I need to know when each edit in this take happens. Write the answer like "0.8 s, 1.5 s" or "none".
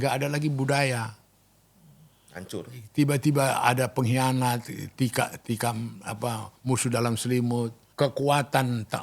7.8 s